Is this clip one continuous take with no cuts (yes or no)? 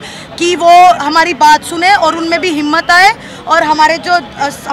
yes